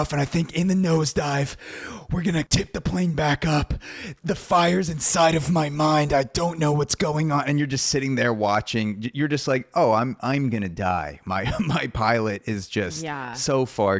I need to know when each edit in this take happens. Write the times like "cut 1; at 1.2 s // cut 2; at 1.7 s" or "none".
cut 1; at 2.5 s // cut 2; at 4.1 s